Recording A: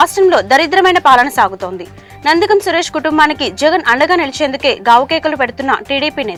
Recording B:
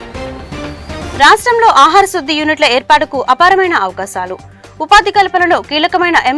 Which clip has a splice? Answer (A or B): B